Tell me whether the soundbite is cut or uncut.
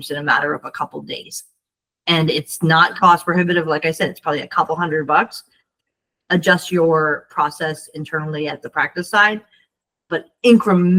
uncut